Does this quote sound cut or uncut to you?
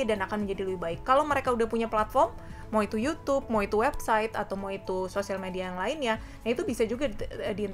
uncut